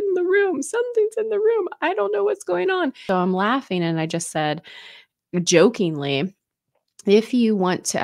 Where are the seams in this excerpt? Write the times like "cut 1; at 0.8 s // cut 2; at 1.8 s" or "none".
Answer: cut 1; at 3.0 s